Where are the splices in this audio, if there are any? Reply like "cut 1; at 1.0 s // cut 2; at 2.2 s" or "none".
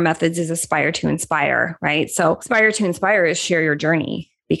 cut 1; at 2.4 s